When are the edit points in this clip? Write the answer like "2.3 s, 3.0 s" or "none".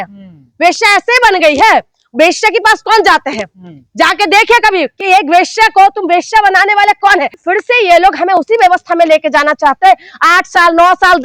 7.4 s